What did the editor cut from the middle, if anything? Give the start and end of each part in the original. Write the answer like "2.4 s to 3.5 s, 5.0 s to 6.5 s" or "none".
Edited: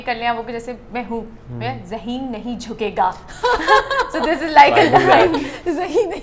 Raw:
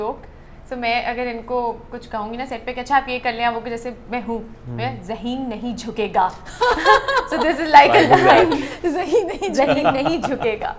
none